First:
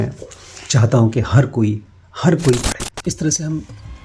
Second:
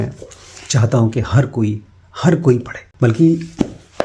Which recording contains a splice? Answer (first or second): first